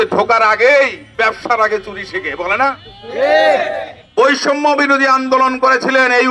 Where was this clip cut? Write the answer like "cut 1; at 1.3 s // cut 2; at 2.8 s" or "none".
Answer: cut 1; at 3.9 s